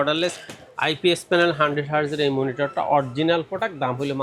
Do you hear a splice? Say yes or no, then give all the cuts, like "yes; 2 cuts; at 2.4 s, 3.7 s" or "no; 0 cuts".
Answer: no; 0 cuts